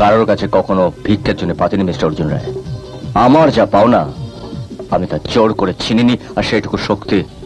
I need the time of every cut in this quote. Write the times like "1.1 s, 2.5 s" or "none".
none